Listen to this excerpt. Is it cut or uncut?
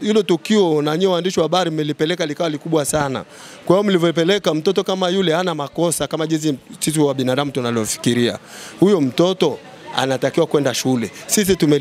uncut